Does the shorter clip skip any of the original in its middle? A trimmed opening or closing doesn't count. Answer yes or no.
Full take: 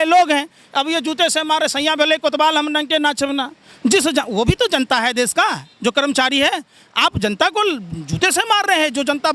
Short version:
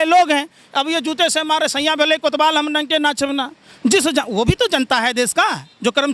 no